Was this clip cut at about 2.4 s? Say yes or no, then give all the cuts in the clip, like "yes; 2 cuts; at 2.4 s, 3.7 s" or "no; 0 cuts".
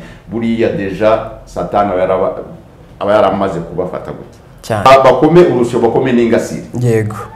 no; 1 cut; at 4.9 s